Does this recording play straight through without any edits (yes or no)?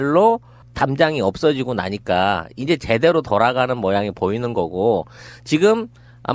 no